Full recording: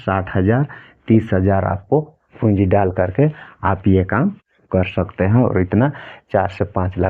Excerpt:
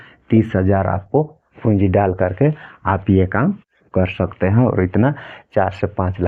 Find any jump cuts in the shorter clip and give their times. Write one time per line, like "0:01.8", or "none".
none